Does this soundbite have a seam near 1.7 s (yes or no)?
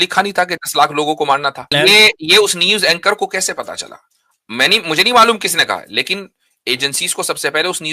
yes